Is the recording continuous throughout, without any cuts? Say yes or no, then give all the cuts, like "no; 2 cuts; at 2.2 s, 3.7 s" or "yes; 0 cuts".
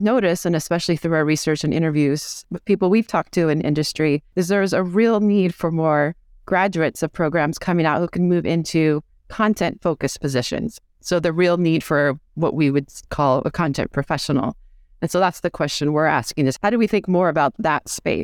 no; 3 cuts; at 2.4 s, 4.3 s, 16.6 s